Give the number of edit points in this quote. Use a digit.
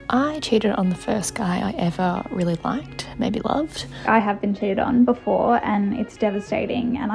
1